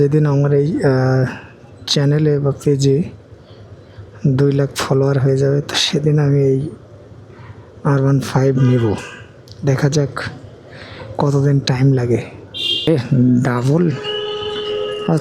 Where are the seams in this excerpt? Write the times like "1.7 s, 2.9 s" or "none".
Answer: 12.9 s